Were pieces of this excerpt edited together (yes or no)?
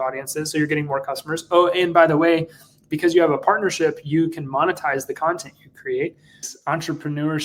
yes